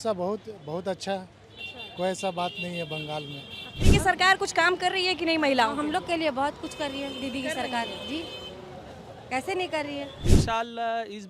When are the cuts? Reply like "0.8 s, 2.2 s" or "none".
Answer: 3.8 s, 10.2 s